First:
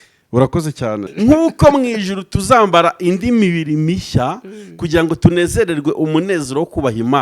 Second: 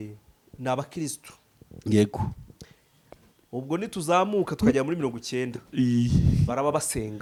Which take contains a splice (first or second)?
first